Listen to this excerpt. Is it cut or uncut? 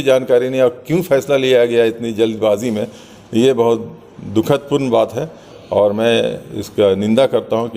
cut